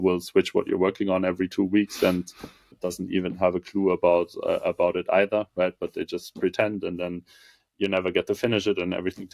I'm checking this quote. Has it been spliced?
yes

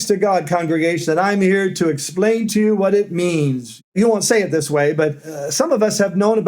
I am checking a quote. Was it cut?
yes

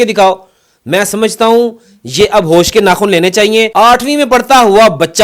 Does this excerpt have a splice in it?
yes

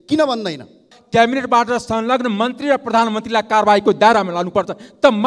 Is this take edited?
yes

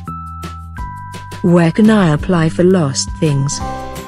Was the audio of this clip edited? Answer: yes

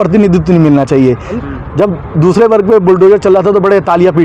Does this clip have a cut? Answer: yes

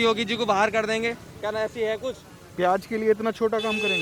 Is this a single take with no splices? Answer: yes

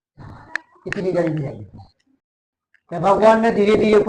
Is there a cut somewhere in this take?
no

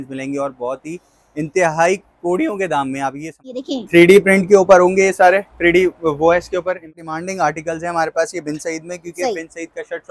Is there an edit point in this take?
yes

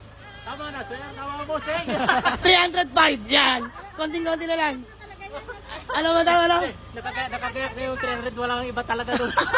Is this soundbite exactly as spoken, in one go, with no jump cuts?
no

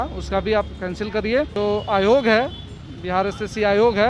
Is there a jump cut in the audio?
yes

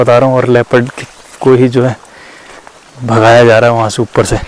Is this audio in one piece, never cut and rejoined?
yes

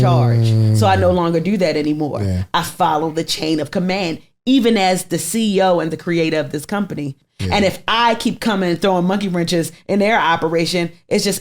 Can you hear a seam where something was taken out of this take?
yes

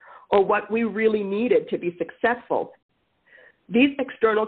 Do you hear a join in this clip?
yes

